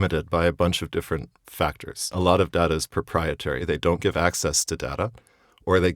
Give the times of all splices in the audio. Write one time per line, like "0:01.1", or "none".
0:02.1
0:03.6